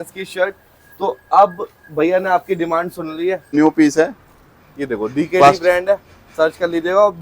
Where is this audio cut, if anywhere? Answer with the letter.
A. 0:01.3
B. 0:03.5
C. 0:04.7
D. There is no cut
B